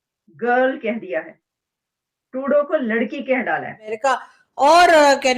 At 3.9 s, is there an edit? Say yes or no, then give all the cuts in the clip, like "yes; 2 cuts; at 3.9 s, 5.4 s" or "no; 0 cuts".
yes; 1 cut; at 3.9 s